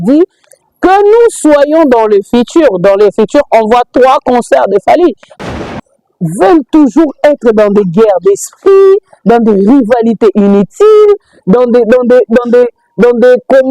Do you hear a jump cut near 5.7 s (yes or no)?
yes